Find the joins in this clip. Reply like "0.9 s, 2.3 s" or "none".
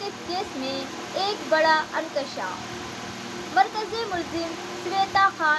none